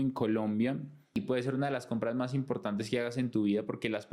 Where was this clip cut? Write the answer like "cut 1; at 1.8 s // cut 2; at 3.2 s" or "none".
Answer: cut 1; at 1.2 s